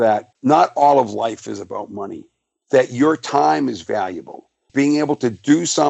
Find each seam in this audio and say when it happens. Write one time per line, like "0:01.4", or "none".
0:04.6